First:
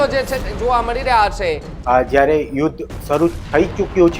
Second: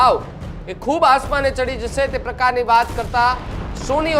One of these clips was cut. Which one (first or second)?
first